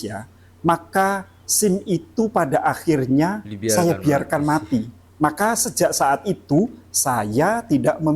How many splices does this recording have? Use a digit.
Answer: 1